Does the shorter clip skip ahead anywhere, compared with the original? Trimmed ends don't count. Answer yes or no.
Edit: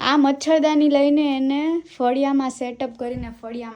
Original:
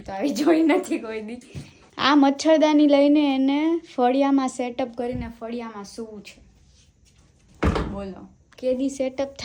no